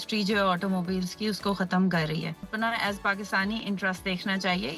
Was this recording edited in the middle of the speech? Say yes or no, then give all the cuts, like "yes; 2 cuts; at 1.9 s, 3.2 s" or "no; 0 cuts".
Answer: yes; 1 cut; at 2.4 s